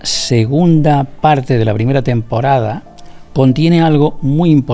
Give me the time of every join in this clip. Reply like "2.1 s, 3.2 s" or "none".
none

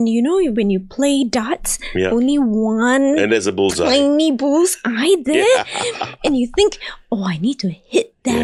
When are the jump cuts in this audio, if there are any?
none

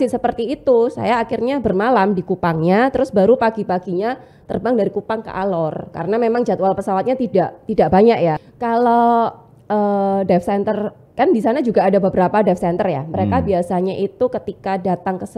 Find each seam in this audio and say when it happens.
8.5 s

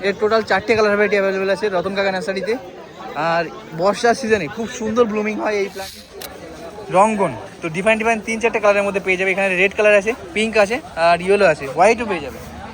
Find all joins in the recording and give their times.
5.8 s

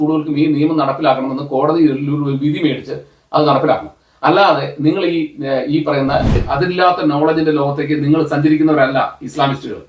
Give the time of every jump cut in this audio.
6.4 s

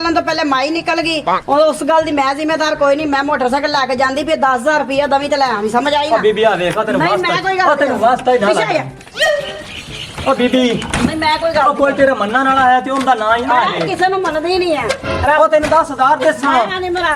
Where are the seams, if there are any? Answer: none

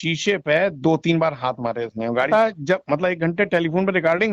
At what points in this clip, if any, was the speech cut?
2.3 s

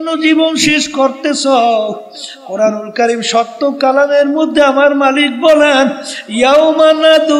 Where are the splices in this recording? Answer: none

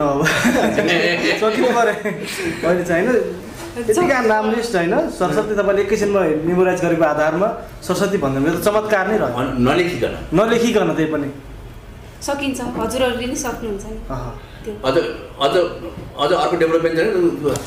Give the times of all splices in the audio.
none

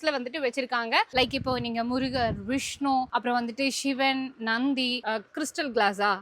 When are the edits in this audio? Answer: 1.1 s, 5.0 s

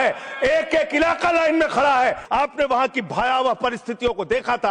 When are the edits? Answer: 2.2 s

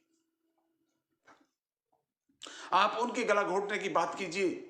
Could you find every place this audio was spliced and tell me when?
1.3 s

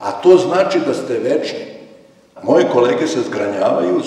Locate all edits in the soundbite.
2.3 s

